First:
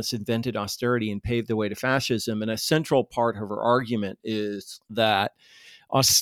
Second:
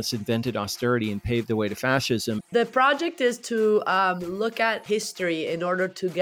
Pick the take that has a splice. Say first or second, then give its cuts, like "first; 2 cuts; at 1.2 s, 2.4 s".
second; 2 cuts; at 2.4 s, 4.8 s